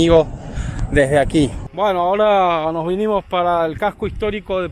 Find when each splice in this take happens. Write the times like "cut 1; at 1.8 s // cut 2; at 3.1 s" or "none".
cut 1; at 1.6 s